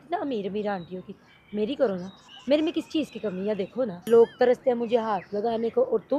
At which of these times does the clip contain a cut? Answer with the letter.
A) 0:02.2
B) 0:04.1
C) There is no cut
B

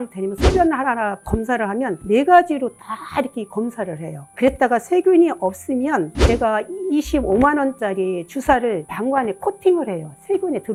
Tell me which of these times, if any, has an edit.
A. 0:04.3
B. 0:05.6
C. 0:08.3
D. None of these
D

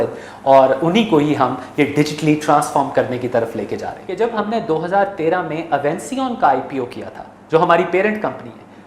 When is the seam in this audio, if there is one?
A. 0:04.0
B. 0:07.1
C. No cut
A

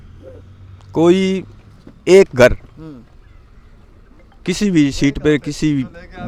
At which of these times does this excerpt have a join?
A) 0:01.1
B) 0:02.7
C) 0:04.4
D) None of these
D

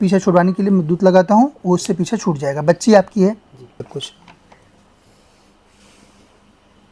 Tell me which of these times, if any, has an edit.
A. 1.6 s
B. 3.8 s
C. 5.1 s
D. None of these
B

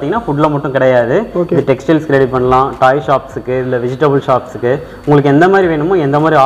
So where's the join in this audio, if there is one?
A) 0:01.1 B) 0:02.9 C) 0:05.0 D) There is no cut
D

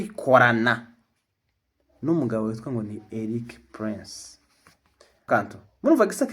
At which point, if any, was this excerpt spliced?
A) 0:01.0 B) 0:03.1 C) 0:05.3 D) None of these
C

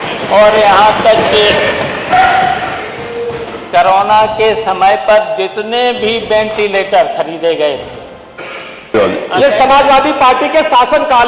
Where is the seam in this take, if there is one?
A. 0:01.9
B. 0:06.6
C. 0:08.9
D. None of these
C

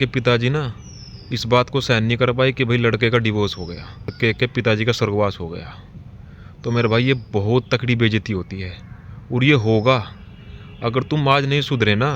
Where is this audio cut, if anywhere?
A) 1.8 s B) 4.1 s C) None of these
B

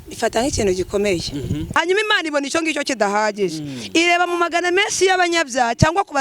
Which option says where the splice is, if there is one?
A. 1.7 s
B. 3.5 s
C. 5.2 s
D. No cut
A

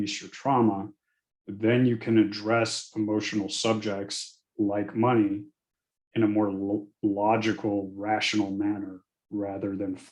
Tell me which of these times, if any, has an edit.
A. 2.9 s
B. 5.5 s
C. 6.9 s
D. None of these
D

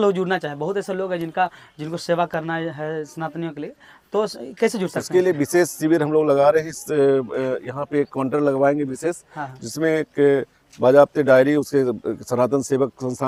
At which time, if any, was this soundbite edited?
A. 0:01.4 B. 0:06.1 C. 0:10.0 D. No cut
D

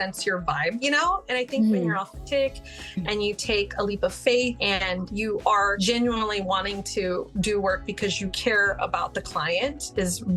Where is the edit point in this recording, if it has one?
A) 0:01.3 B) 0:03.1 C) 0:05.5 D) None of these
D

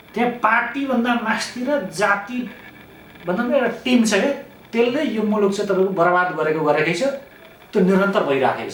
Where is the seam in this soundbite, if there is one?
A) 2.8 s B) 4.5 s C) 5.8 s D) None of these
D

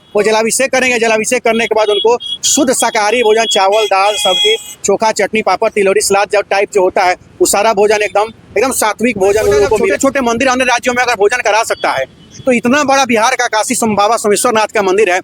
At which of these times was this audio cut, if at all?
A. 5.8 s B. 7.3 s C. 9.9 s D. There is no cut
C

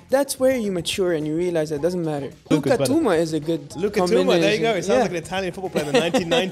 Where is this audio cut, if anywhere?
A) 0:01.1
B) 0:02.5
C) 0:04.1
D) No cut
B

